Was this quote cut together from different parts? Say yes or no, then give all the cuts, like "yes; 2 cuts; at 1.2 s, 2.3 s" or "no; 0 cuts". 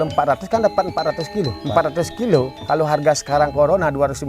yes; 1 cut; at 1.6 s